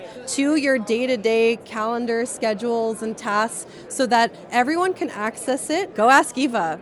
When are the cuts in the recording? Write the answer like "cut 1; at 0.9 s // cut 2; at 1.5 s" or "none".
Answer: cut 1; at 5.9 s